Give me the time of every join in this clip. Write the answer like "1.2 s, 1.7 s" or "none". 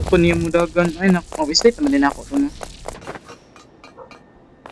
3.0 s